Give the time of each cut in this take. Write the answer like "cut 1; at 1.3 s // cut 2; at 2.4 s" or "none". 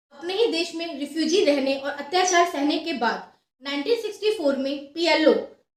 none